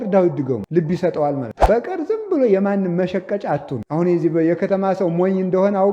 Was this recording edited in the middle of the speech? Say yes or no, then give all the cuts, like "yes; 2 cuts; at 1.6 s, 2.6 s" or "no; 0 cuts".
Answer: yes; 1 cut; at 1.6 s